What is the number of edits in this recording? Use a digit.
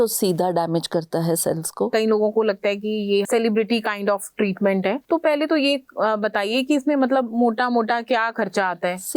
3